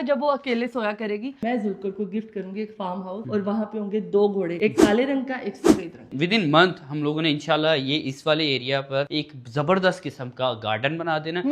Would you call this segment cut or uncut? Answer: cut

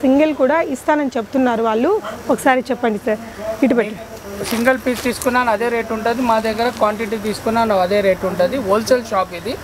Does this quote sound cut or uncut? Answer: uncut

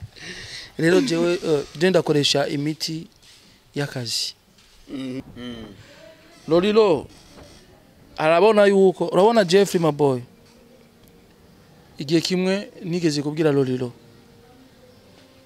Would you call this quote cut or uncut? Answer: cut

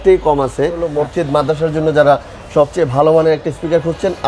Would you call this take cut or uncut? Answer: cut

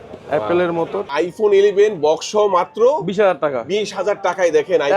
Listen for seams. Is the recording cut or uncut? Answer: cut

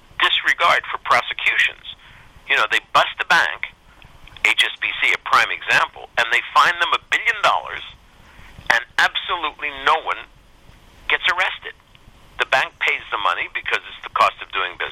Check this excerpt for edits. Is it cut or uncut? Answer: uncut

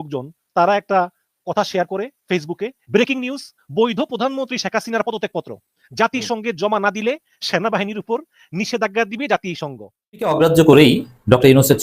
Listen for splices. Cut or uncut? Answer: cut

